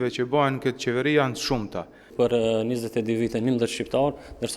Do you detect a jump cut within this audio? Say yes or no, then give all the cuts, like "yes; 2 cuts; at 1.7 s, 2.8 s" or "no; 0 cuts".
yes; 1 cut; at 2.0 s